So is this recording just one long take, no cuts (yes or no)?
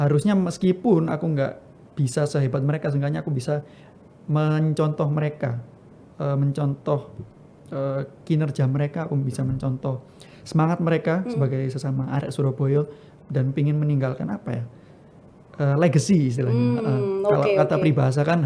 yes